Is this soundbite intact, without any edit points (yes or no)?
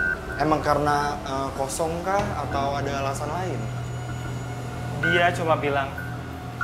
yes